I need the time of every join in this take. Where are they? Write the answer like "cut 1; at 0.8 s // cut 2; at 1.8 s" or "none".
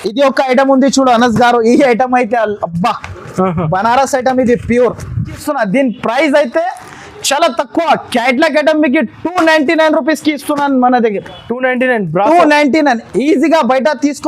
cut 1; at 5.4 s